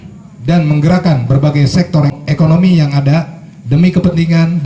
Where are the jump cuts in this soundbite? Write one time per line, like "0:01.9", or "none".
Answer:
0:02.1